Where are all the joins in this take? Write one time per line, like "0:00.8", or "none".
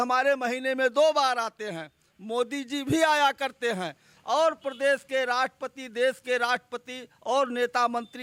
none